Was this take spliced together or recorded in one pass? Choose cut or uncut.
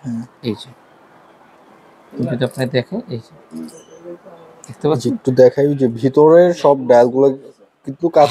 uncut